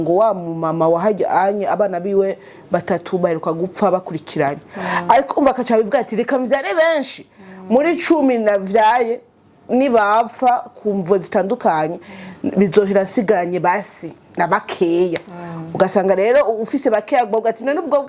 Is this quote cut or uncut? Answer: uncut